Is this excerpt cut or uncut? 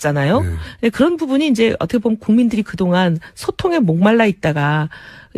cut